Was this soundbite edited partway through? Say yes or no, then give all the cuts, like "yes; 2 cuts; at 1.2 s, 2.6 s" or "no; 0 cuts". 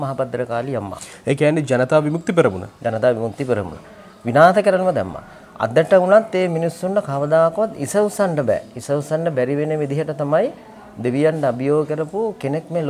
no; 0 cuts